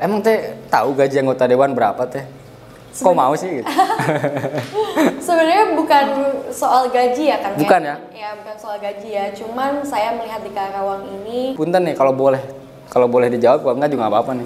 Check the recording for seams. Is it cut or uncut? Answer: cut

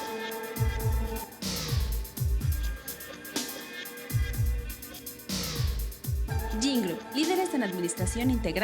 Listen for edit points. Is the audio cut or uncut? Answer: cut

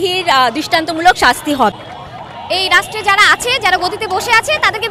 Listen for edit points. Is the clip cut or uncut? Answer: cut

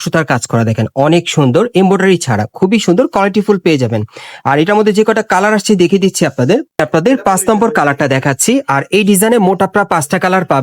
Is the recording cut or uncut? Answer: cut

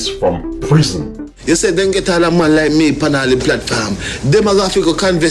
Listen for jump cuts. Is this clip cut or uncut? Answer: cut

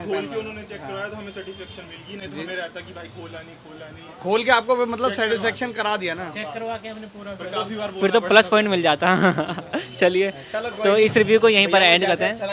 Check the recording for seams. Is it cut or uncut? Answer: uncut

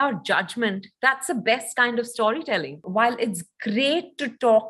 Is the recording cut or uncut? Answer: cut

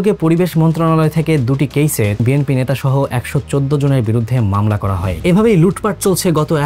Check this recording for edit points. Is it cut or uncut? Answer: cut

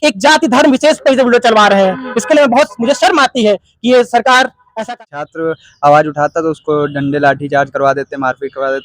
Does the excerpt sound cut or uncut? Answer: cut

